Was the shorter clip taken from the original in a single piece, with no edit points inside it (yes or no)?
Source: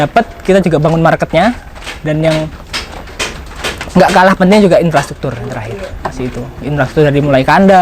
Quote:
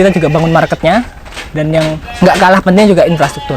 no